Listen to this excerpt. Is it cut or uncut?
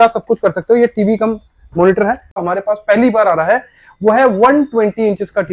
cut